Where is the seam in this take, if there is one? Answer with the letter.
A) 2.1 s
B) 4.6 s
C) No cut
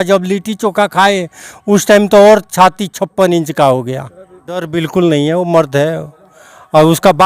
B